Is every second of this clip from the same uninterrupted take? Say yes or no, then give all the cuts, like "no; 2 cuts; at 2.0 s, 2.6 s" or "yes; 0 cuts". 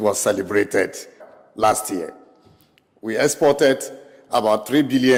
yes; 0 cuts